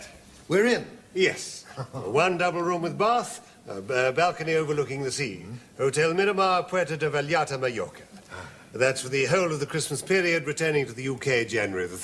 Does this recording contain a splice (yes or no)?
yes